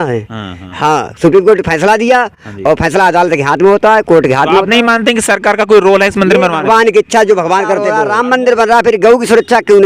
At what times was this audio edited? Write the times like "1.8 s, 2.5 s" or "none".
8.0 s